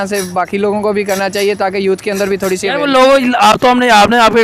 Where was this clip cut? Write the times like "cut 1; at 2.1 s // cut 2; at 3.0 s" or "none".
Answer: none